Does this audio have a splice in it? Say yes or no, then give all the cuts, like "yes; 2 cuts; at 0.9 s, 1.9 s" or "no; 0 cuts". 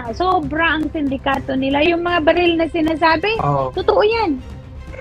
no; 0 cuts